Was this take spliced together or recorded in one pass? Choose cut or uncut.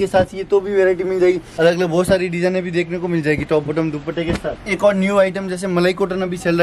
cut